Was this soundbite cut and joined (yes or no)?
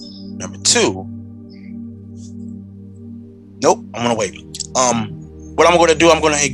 no